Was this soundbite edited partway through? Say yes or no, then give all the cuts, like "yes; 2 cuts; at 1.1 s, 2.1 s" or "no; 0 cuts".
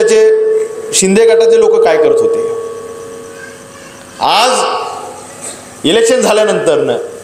no; 0 cuts